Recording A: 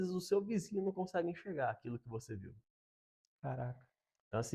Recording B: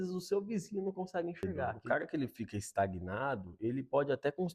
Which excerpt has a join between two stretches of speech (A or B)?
B